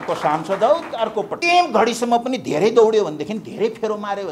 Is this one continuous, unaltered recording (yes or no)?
no